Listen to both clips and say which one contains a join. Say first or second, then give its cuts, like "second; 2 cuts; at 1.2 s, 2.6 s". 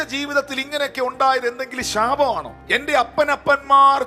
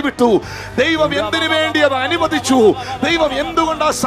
first; 1 cut; at 2.5 s